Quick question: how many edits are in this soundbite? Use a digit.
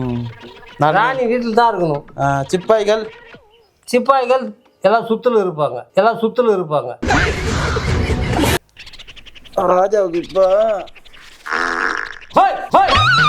1